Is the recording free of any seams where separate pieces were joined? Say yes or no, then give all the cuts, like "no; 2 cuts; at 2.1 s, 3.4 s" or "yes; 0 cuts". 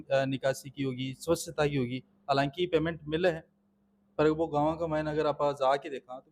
yes; 0 cuts